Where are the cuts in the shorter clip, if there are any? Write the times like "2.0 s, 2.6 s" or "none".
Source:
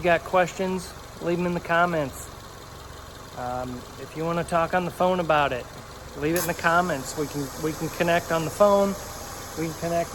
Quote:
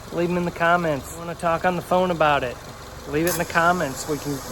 1.3 s